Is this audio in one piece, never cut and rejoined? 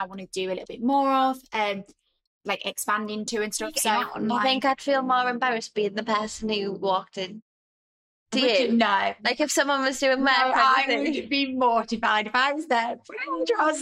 no; 1 cut; at 4.2 s

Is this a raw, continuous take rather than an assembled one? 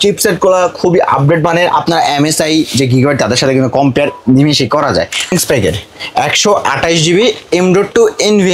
no; 1 cut; at 5.3 s

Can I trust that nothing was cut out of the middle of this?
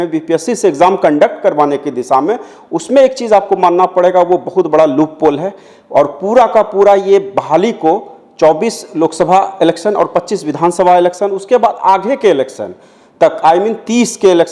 yes; 0 cuts

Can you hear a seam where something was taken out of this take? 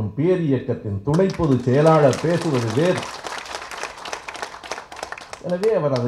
no; 0 cuts

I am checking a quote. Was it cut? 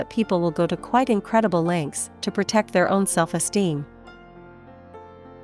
yes; 1 cut; at 3.9 s

